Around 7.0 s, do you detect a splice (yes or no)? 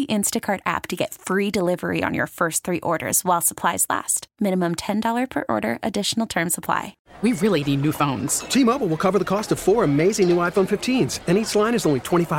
yes